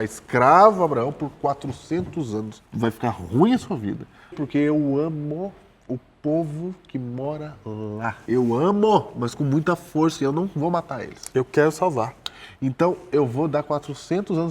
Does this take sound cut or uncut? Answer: cut